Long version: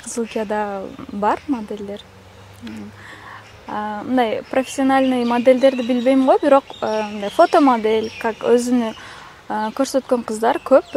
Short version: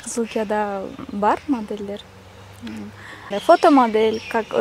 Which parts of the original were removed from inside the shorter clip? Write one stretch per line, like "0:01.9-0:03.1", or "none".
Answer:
0:03.3-0:07.2